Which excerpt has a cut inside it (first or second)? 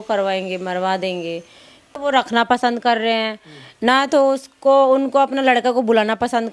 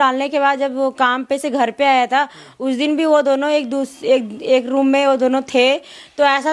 first